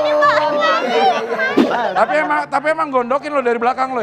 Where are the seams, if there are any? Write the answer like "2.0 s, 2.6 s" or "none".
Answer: 1.6 s